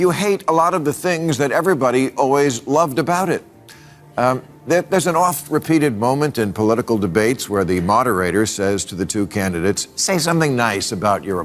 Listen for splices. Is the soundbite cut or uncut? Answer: uncut